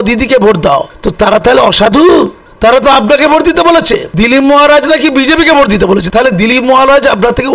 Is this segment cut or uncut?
cut